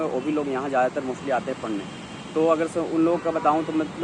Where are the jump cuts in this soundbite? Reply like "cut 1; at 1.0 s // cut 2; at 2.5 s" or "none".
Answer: none